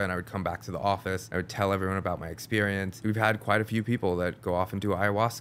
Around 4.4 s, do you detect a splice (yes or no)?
no